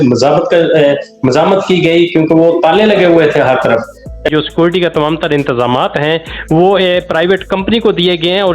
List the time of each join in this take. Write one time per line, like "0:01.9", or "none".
0:04.3

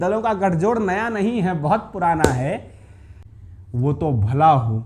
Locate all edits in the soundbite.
0:03.4

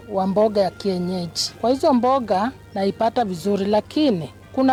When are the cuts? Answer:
none

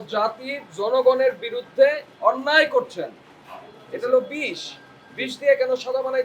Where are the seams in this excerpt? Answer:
none

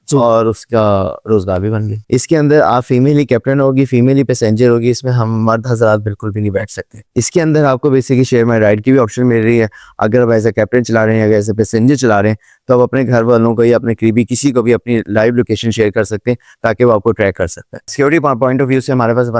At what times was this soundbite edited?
0:02.0
0:07.0
0:17.8

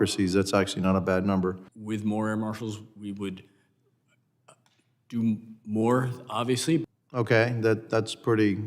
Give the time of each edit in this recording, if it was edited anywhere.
0:01.7
0:06.8

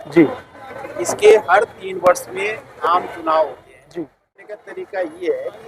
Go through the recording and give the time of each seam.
0:04.6

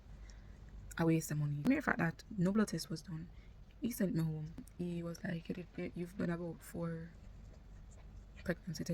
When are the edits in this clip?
0:01.6
0:04.7

